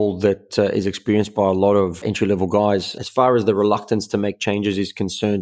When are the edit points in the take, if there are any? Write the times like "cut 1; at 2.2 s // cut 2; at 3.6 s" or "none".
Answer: cut 1; at 3.0 s

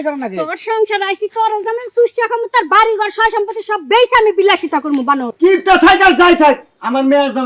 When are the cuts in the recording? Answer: cut 1; at 5.3 s

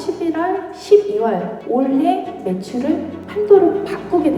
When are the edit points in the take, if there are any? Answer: cut 1; at 1.6 s // cut 2; at 3.2 s

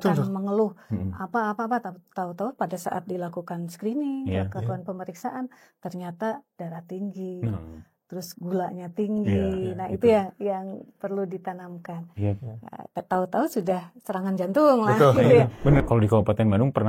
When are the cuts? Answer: cut 1; at 15.8 s

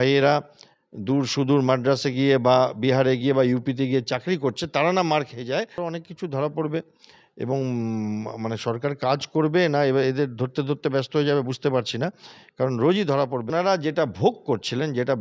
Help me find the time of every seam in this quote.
cut 1; at 5.9 s // cut 2; at 13.5 s

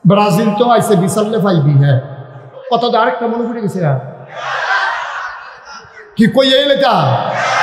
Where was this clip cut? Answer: cut 1; at 2.6 s

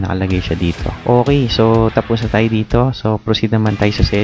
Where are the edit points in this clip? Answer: cut 1; at 0.9 s

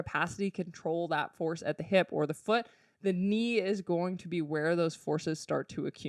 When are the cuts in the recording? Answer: none

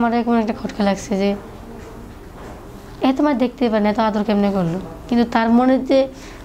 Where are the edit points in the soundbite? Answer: none

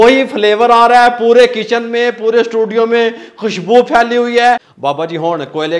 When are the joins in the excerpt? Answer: cut 1; at 4.7 s

